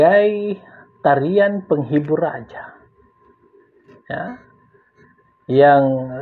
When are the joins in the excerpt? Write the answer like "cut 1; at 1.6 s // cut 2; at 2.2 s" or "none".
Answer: none